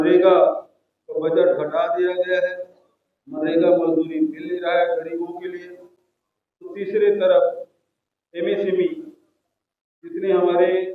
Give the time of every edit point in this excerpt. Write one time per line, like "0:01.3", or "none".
none